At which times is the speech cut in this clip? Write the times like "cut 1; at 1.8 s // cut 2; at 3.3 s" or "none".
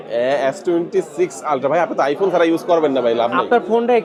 none